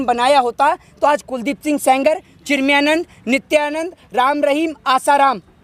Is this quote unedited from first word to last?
yes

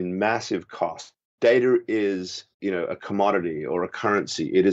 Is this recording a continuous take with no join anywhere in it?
no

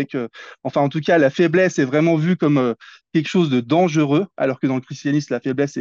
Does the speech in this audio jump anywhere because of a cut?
no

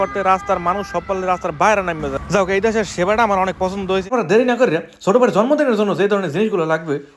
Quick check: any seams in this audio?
yes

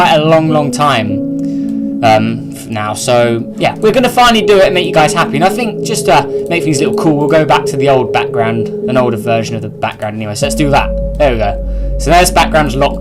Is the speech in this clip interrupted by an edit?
no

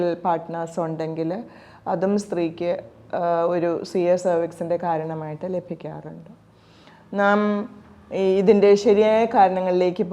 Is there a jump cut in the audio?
no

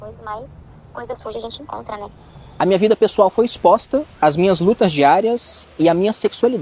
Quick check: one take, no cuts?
no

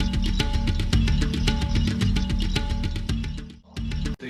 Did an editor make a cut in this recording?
no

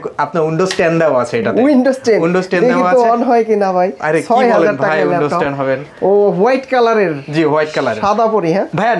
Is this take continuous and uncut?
yes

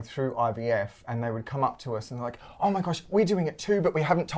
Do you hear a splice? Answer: no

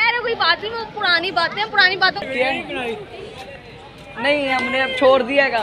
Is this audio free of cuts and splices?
no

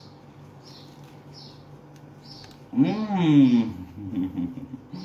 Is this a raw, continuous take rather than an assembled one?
yes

